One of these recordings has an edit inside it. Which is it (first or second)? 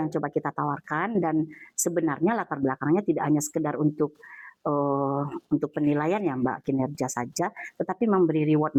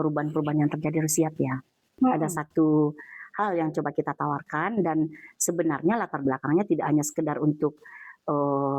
second